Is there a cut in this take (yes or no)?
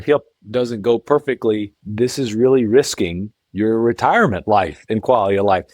yes